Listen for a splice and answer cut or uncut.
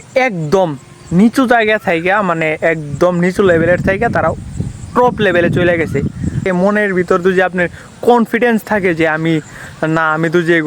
cut